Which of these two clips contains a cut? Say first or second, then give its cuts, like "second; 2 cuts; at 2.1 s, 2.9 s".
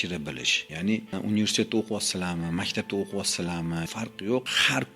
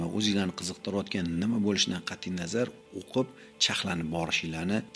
first; 2 cuts; at 0.9 s, 3.8 s